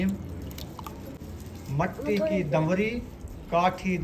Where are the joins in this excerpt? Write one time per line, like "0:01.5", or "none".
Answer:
0:01.2